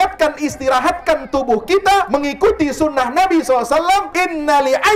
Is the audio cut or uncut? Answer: cut